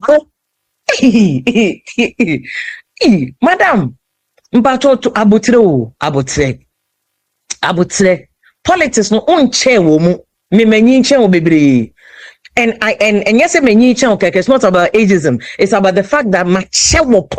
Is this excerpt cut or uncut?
uncut